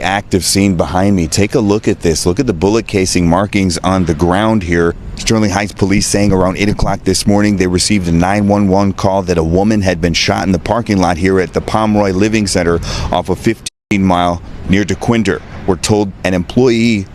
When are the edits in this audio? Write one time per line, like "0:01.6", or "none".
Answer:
0:13.7

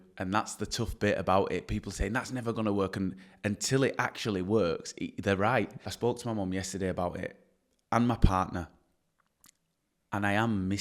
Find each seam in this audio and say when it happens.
0:05.9

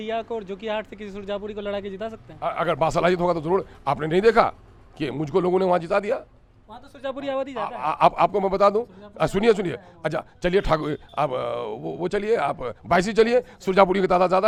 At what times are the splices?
none

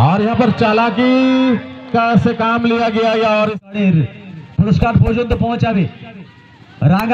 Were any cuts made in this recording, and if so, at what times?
0:03.7

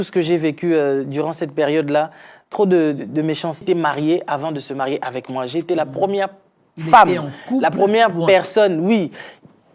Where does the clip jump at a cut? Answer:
0:03.6

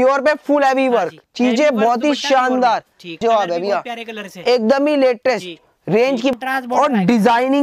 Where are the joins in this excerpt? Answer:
0:03.2
0:06.3

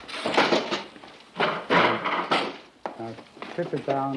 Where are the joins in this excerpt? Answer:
0:01.6

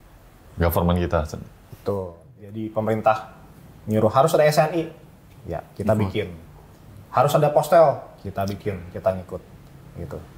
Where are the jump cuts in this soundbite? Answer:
0:02.4

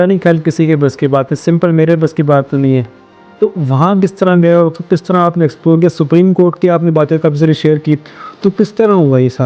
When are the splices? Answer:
none

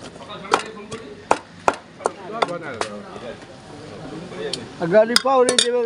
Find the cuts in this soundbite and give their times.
0:02.7

